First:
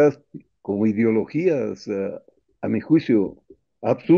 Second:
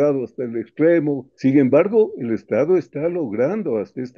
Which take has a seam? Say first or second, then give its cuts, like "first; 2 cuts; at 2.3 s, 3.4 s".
second; 1 cut; at 1.3 s